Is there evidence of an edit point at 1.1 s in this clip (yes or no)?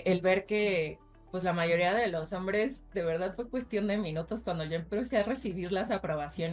no